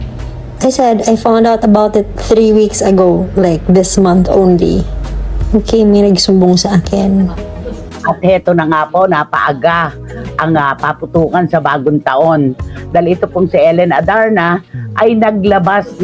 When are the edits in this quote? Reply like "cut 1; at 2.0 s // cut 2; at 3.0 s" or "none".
cut 1; at 7.9 s